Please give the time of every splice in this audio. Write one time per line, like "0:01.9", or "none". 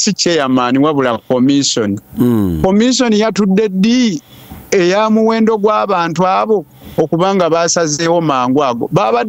none